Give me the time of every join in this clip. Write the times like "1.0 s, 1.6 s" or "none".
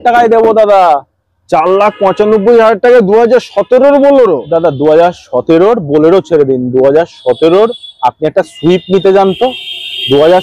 none